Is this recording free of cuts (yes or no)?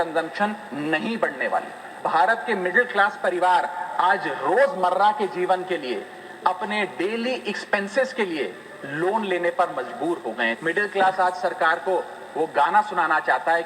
no